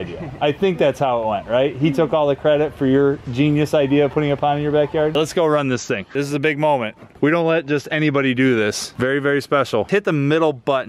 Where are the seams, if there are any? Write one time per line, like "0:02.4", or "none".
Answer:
0:05.1
0:08.9
0:09.9